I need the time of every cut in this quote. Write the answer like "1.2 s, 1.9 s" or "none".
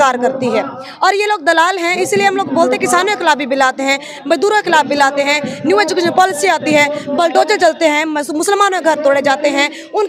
none